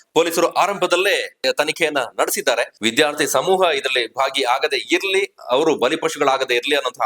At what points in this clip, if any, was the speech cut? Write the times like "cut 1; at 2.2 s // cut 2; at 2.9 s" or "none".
cut 1; at 1.4 s // cut 2; at 2.7 s

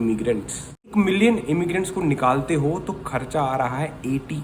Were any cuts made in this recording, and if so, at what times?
cut 1; at 0.9 s

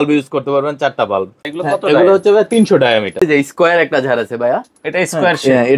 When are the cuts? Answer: cut 1; at 1.4 s // cut 2; at 3.2 s

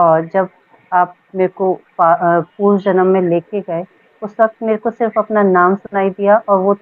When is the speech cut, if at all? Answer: none

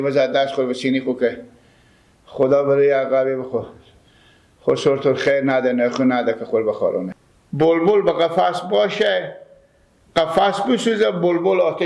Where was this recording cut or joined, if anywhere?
cut 1; at 7.1 s

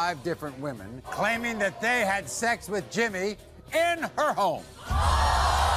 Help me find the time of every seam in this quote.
cut 1; at 1.1 s

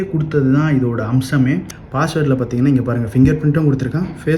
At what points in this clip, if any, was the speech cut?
cut 1; at 1.8 s

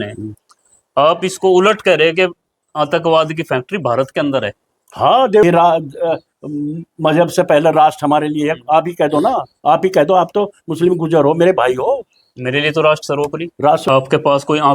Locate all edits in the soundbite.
cut 1; at 5.4 s // cut 2; at 13.8 s

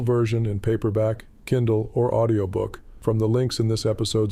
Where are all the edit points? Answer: cut 1; at 2.8 s

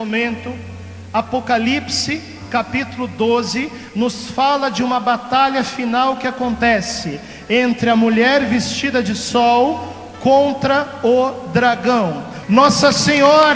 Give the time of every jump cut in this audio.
cut 1; at 12.3 s

